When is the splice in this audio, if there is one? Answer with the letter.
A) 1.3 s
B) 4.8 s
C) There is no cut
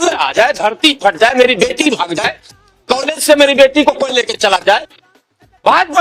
C